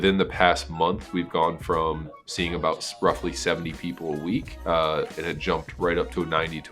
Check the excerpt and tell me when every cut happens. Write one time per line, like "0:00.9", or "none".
0:04.5